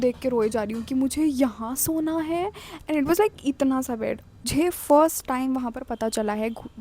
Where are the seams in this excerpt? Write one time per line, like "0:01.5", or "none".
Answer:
0:04.5